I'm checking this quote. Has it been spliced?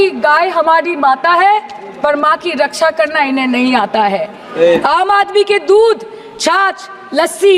no; 0 cuts

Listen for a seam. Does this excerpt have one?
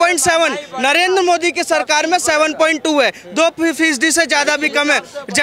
no; 0 cuts

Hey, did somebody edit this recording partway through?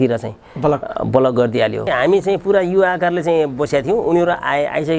yes; 1 cut; at 1.9 s

